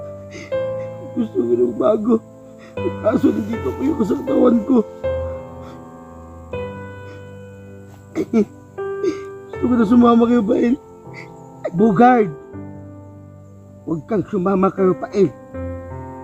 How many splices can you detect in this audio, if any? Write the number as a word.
four